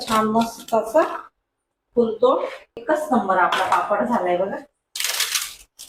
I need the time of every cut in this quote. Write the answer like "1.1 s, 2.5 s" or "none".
2.7 s